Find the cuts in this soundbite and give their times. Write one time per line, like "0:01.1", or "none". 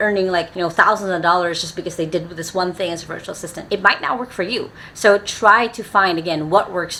none